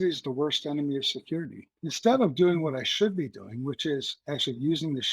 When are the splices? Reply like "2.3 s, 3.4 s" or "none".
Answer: 1.6 s